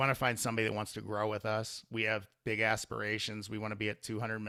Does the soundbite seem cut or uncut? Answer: uncut